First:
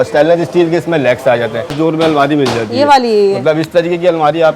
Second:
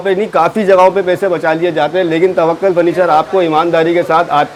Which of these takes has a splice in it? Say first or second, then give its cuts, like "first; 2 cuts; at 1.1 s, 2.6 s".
first; 1 cut; at 1.7 s